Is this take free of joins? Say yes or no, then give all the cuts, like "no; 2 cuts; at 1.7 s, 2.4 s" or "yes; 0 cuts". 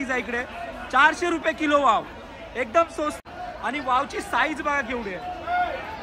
no; 1 cut; at 3.2 s